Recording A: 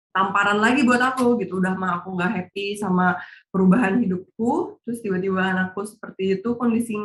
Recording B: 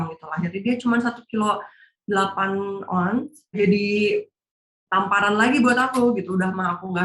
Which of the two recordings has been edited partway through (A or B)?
B